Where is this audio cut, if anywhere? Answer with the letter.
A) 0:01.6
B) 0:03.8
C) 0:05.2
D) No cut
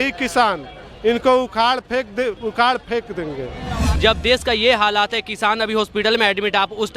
B